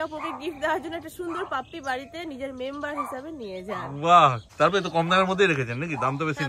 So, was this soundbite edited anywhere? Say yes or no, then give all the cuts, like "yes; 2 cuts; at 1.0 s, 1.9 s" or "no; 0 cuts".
yes; 1 cut; at 4.4 s